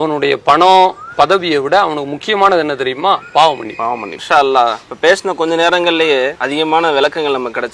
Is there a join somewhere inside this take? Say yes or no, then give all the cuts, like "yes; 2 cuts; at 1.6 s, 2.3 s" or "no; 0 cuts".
yes; 3 cuts; at 4.1 s, 4.9 s, 6.4 s